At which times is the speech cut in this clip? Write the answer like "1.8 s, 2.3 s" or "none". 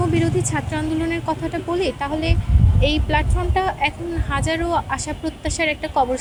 none